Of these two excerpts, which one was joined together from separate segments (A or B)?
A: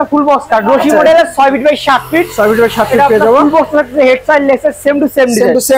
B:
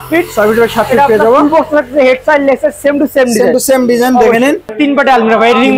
B